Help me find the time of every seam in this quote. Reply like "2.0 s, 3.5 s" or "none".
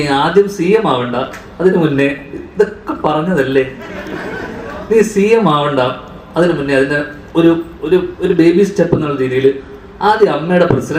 none